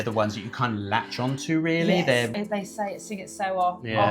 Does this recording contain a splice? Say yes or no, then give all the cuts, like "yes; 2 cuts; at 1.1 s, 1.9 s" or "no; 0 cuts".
yes; 1 cut; at 2.3 s